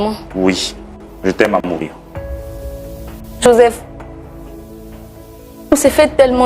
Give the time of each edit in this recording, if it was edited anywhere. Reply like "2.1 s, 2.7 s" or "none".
2.0 s, 3.4 s